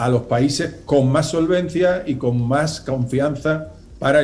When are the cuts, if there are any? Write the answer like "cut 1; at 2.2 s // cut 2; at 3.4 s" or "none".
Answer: none